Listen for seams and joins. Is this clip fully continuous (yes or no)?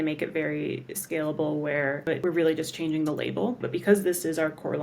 no